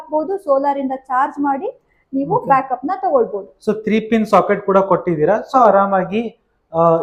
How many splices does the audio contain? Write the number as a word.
zero